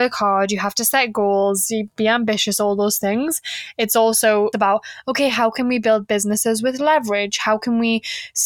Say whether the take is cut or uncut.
cut